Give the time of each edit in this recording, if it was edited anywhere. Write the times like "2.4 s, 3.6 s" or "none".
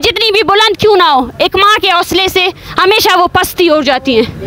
none